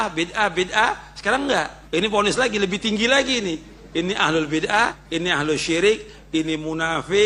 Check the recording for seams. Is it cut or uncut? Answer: cut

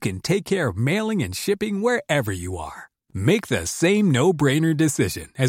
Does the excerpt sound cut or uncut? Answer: uncut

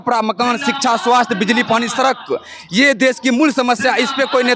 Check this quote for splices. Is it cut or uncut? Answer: uncut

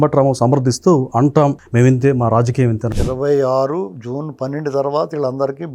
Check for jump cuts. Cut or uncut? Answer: cut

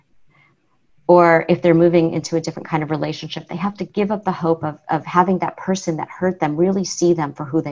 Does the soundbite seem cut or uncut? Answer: uncut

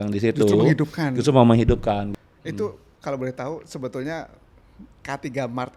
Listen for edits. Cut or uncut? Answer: cut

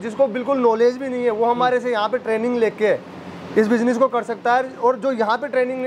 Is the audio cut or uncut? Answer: uncut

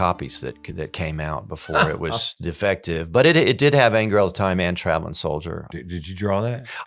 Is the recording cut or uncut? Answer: cut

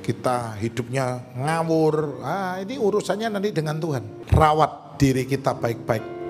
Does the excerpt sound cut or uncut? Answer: cut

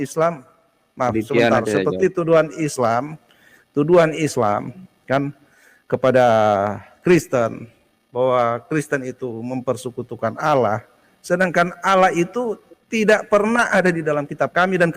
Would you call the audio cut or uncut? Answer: uncut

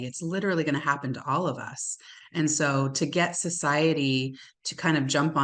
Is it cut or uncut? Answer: uncut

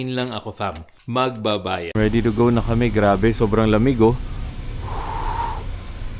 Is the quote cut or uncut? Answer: cut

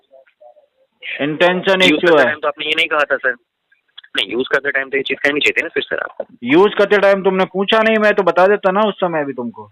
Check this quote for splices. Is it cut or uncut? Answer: uncut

